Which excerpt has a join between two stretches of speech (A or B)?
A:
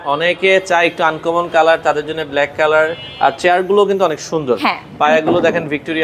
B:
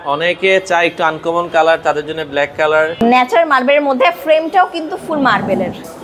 B